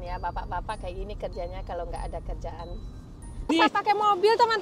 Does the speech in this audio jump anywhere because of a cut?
yes; 1 cut; at 3.5 s

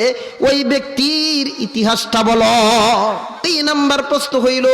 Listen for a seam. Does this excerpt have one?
yes; 1 cut; at 3.5 s

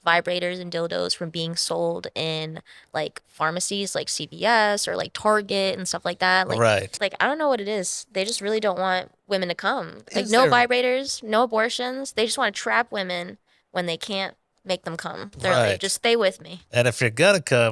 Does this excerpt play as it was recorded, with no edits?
no; 2 cuts; at 6.9 s, 10.1 s

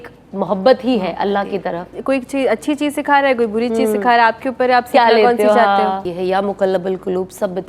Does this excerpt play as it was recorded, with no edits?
no; 2 cuts; at 1.9 s, 6.1 s

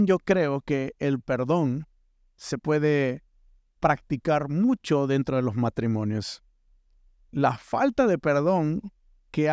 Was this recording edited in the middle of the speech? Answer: no; 0 cuts

